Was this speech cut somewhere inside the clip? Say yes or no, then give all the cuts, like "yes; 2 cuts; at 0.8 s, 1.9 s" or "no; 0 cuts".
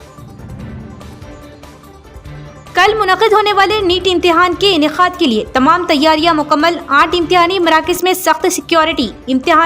no; 0 cuts